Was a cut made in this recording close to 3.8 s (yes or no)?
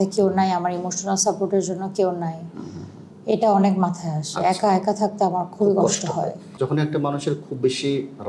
no